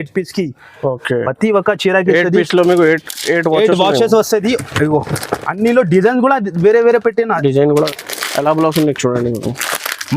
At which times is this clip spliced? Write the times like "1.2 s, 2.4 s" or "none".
7.9 s